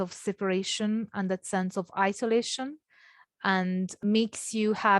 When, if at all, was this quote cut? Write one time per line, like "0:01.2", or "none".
0:04.0